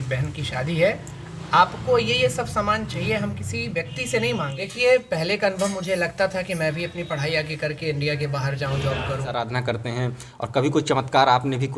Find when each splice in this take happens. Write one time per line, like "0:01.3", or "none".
0:04.6
0:09.5